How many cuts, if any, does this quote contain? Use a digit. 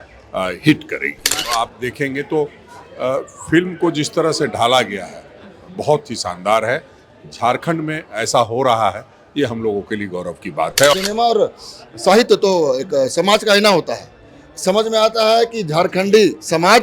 2